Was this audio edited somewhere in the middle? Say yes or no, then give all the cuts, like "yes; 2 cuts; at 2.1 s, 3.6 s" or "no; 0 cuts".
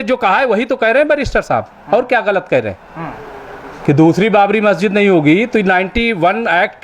no; 0 cuts